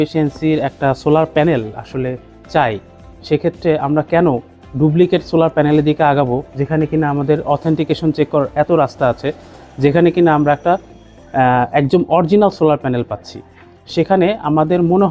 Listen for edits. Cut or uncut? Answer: uncut